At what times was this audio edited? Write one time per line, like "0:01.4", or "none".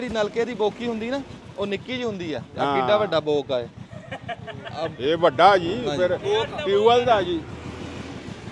none